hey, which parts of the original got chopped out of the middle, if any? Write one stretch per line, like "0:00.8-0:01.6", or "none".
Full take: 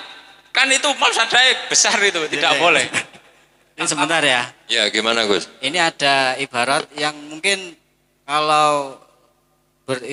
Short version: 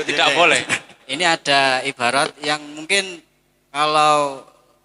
0:03.3-0:05.6